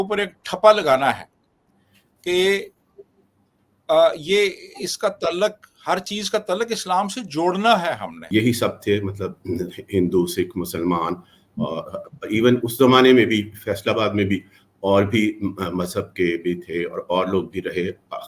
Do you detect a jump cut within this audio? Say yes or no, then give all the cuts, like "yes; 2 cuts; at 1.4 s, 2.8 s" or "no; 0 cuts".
yes; 1 cut; at 8.3 s